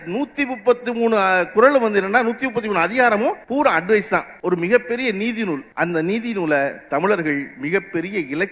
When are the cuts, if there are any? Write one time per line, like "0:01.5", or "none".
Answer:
0:03.4
0:04.3
0:05.7